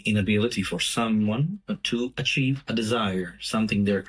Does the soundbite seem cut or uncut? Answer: cut